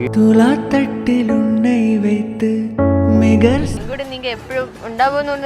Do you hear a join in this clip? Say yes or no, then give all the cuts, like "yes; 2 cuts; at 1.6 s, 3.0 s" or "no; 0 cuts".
yes; 1 cut; at 3.7 s